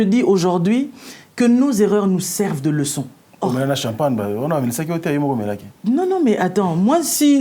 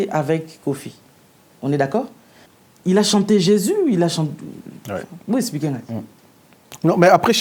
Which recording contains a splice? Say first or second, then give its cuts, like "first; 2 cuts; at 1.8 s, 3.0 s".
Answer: first; 1 cut; at 3.2 s